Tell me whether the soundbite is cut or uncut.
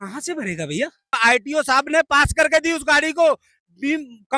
cut